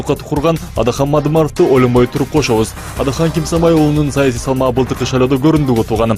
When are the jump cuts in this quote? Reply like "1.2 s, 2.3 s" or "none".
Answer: 1.8 s